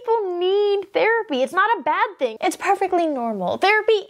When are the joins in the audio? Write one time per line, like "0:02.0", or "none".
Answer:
0:02.4